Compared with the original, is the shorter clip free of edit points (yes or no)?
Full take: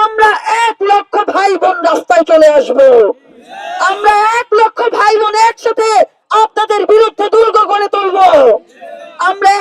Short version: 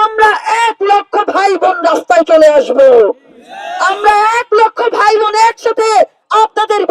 yes